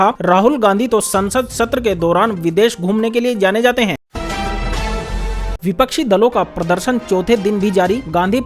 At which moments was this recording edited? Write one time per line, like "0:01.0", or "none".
0:04.0
0:05.1

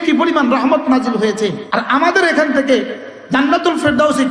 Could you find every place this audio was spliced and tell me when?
0:01.6

